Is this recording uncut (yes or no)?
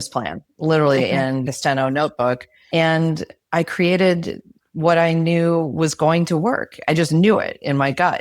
no